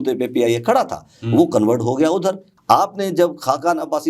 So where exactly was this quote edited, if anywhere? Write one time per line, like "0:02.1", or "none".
0:02.5